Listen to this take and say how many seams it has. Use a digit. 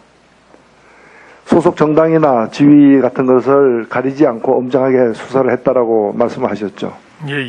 1